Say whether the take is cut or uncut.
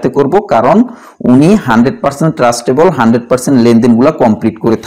uncut